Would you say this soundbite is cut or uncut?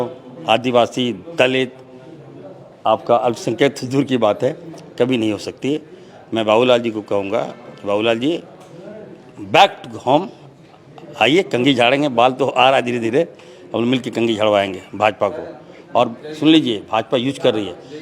uncut